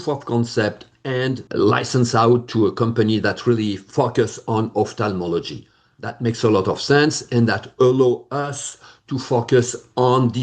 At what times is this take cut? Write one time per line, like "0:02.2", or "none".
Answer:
0:01.4